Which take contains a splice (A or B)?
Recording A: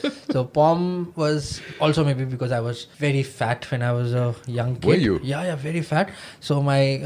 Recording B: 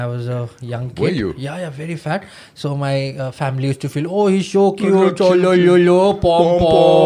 A